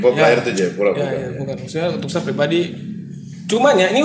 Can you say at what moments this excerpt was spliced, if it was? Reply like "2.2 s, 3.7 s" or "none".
none